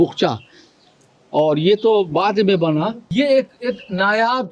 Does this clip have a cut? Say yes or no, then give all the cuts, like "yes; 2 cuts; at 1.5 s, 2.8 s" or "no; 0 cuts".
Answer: yes; 1 cut; at 3.0 s